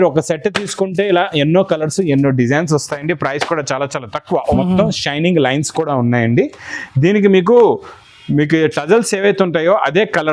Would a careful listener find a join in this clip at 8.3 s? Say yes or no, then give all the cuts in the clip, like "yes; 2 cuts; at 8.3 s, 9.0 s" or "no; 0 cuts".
no; 1 cut; at 4.5 s